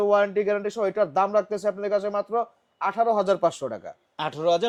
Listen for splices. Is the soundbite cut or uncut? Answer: uncut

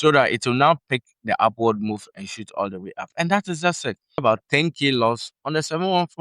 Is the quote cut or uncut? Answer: cut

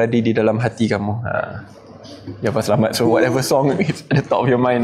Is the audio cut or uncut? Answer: uncut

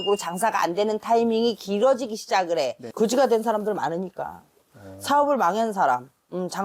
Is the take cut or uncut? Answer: cut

